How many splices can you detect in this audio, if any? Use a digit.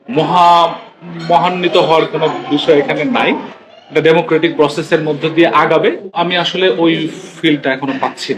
1